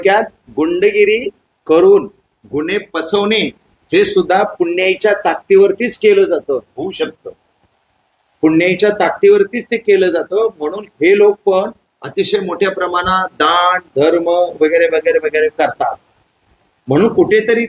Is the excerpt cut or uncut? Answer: uncut